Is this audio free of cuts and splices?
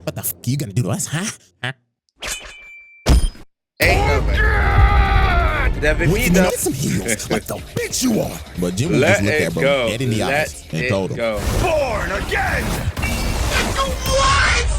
no; 1 cut; at 6.5 s

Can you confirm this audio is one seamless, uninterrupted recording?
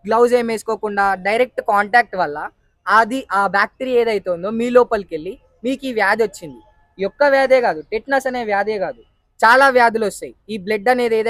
yes; 0 cuts

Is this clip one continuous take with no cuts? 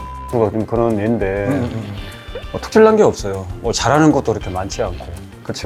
yes; 0 cuts

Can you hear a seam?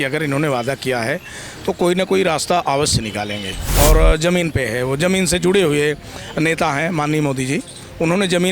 yes; 1 cut; at 3.7 s

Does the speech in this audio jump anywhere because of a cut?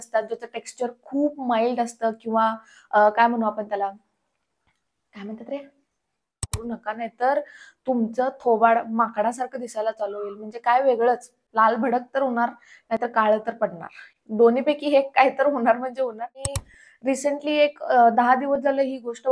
yes; 2 cuts; at 6.6 s, 16.5 s

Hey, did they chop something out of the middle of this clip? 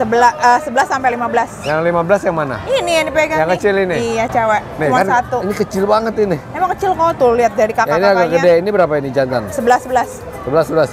no; 0 cuts

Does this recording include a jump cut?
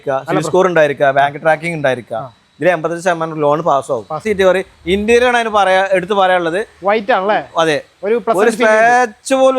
yes; 1 cut; at 4.2 s

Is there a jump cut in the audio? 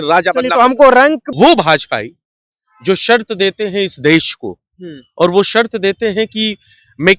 yes; 1 cut; at 1.2 s

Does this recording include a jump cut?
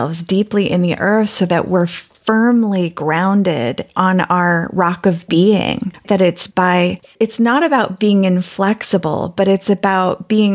yes; 1 cut; at 2.1 s

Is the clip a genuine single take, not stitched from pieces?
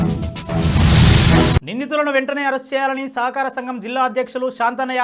no; 1 cut; at 1.5 s

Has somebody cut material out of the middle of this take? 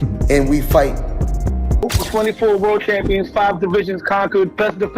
yes; 1 cut; at 1.8 s

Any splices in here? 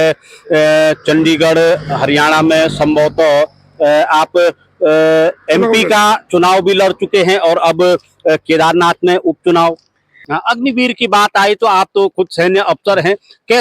yes; 1 cut; at 10.3 s

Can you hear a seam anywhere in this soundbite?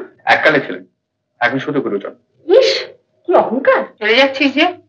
yes; 1 cut; at 3.9 s

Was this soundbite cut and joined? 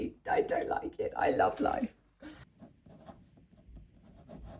no; 0 cuts

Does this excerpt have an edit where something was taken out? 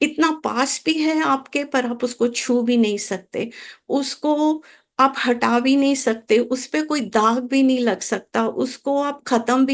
no; 0 cuts

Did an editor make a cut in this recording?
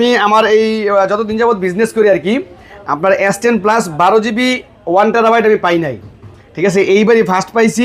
no; 0 cuts

